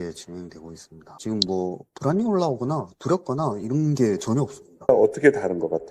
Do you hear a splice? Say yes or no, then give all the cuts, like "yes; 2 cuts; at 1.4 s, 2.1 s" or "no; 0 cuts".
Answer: yes; 2 cuts; at 1.1 s, 4.9 s